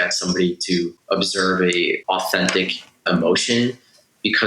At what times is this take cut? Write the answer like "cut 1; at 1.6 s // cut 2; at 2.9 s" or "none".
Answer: cut 1; at 1.0 s // cut 2; at 2.0 s // cut 3; at 3.1 s